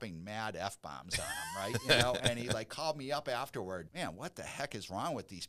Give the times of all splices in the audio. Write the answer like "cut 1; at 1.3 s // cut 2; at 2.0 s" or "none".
cut 1; at 3.9 s